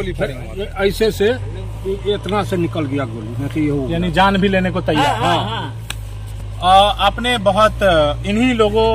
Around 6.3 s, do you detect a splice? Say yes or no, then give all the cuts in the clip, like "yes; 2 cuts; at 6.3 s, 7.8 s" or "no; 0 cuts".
no; 0 cuts